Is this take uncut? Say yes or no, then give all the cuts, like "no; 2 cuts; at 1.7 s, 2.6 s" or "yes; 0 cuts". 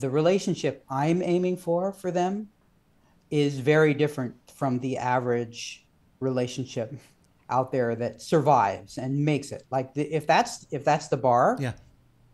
yes; 0 cuts